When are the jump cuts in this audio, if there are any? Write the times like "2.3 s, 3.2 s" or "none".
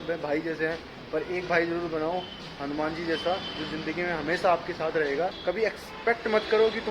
5.4 s